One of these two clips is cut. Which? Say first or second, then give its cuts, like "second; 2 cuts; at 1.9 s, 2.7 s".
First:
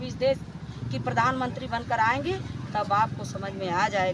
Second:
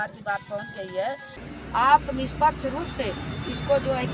second; 1 cut; at 1.4 s